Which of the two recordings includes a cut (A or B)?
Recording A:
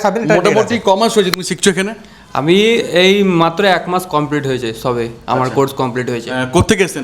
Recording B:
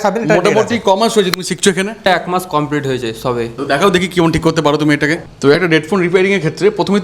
B